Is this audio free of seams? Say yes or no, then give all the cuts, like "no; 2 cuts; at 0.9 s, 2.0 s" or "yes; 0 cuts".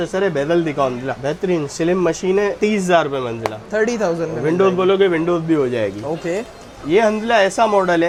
yes; 0 cuts